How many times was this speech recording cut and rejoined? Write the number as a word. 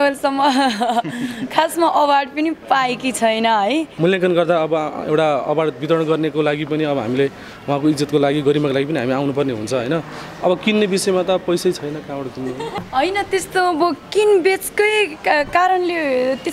two